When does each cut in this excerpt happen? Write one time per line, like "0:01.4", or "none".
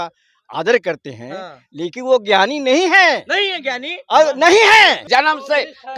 0:05.0